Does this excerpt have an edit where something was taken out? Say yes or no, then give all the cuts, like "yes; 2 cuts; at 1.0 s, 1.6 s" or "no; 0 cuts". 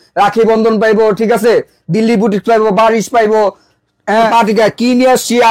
yes; 1 cut; at 4.3 s